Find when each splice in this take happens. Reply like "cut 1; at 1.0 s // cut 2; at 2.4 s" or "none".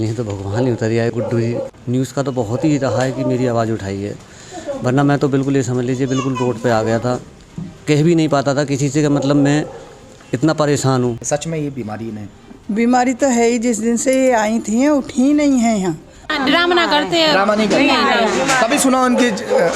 cut 1; at 1.6 s // cut 2; at 11.2 s // cut 3; at 16.3 s